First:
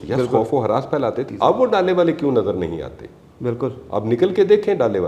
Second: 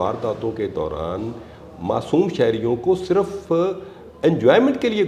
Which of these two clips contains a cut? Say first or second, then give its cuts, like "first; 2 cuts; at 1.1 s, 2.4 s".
first; 1 cut; at 1.3 s